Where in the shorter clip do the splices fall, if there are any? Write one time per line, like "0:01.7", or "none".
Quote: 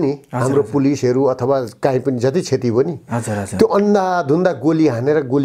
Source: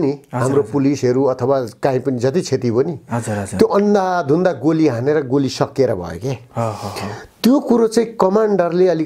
none